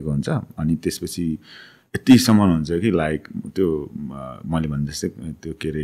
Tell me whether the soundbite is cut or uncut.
uncut